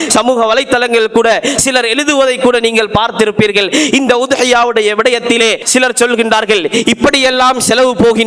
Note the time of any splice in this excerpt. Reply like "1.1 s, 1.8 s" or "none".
5.6 s